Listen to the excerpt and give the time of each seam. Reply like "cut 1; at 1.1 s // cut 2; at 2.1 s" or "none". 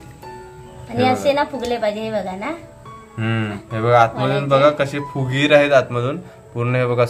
cut 1; at 3.6 s